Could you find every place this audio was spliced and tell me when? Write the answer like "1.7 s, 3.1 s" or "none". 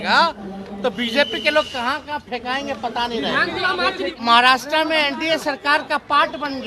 4.1 s